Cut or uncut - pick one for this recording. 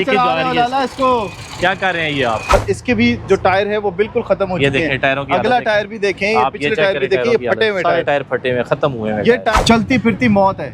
cut